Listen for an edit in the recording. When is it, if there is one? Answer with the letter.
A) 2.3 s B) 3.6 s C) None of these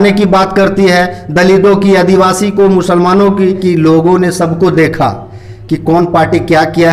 B